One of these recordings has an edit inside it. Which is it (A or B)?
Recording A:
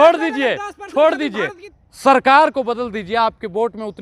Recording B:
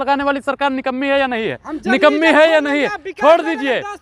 A